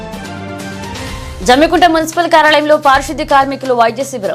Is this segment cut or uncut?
uncut